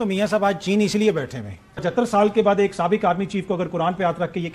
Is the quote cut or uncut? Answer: cut